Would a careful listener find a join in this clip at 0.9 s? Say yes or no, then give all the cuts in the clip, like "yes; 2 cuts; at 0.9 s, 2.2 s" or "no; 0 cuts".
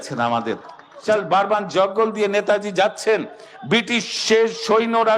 yes; 1 cut; at 0.9 s